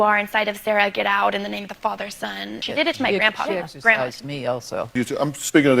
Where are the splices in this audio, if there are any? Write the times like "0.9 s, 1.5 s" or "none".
2.6 s, 4.9 s